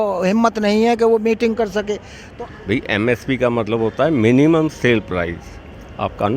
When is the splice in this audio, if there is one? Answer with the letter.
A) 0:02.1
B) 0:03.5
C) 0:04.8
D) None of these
A